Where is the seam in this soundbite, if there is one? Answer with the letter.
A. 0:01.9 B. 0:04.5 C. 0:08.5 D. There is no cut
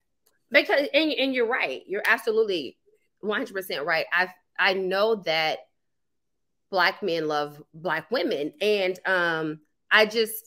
D